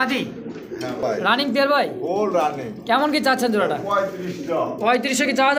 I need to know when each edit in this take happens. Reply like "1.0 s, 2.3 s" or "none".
1.0 s